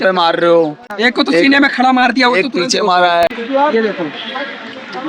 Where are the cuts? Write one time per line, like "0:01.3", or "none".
0:00.9
0:03.3